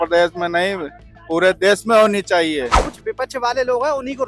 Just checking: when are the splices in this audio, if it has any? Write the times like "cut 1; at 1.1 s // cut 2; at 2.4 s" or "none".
cut 1; at 2.8 s